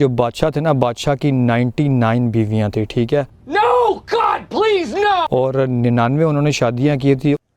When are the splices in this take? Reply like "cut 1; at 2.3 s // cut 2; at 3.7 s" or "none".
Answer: cut 1; at 5.3 s

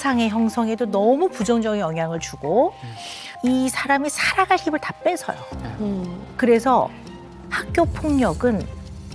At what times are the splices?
none

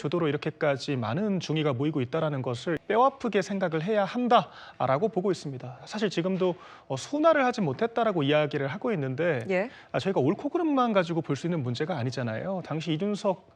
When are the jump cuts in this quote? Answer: cut 1; at 2.8 s

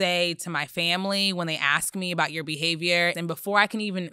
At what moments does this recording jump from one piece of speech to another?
cut 1; at 3.2 s

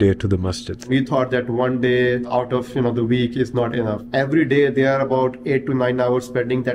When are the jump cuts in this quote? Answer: cut 1; at 0.8 s // cut 2; at 2.3 s // cut 3; at 4.0 s

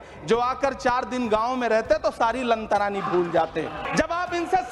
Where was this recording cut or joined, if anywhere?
cut 1; at 3.8 s

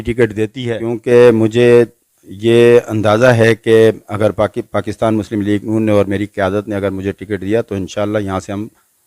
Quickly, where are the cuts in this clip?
none

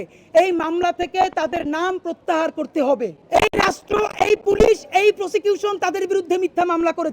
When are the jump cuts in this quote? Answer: cut 1; at 3.2 s

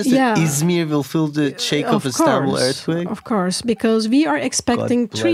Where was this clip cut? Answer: none

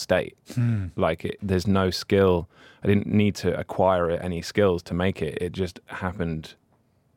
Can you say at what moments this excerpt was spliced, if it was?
cut 1; at 1.4 s

